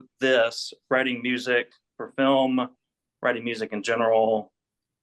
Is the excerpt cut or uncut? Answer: uncut